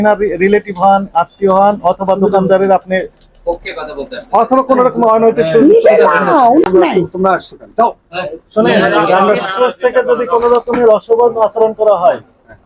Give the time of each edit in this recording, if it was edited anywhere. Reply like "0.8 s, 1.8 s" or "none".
6.7 s